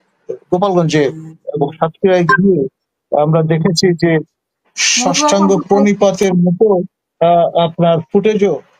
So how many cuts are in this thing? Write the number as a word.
zero